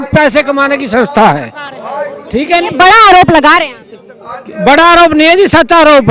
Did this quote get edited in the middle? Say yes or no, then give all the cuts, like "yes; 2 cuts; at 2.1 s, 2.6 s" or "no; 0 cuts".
no; 0 cuts